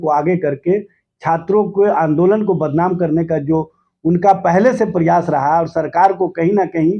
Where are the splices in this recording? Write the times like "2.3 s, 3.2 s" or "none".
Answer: none